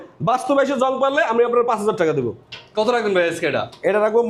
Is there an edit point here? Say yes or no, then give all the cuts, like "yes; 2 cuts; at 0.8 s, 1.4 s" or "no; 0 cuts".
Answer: no; 0 cuts